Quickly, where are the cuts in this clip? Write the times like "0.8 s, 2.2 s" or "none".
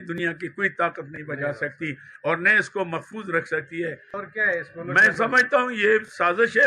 4.1 s